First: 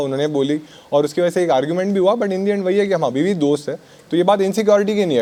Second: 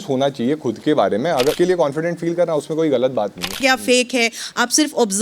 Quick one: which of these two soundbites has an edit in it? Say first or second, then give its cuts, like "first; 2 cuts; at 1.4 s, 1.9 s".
second; 2 cuts; at 1.5 s, 3.6 s